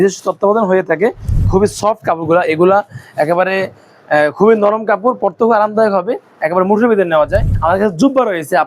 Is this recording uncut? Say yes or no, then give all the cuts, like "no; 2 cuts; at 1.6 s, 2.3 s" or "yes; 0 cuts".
no; 2 cuts; at 1.4 s, 7.5 s